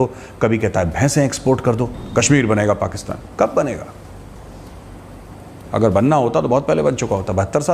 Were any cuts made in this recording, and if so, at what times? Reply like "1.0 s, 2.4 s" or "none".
2.0 s